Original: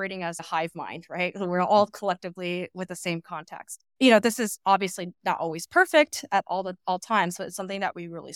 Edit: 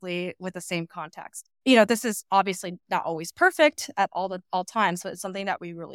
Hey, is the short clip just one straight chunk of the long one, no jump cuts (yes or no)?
yes